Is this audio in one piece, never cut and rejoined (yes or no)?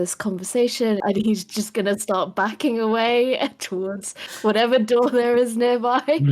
no